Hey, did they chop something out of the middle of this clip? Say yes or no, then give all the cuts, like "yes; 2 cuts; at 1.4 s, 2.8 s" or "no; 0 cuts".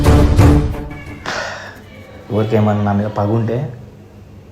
yes; 1 cut; at 1.1 s